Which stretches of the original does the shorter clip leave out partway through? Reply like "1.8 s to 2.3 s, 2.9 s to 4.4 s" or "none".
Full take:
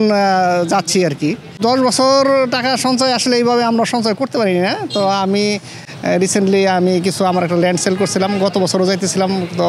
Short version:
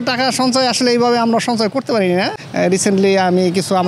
4.8 s to 5.9 s